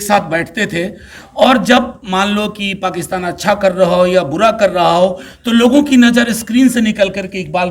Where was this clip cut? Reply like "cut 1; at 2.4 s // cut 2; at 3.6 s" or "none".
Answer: none